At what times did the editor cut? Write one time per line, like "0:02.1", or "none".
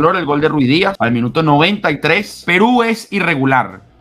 0:01.0
0:02.4